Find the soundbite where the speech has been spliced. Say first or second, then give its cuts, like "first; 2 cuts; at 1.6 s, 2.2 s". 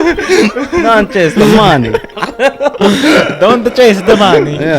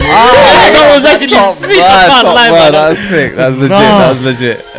first; 1 cut; at 2.1 s